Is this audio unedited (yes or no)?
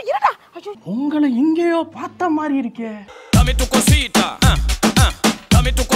yes